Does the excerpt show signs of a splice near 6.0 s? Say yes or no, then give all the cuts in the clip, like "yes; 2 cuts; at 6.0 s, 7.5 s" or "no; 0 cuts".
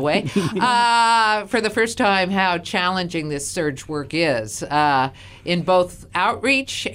yes; 1 cut; at 6.0 s